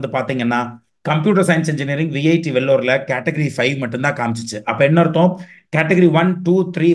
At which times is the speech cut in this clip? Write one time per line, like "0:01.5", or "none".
none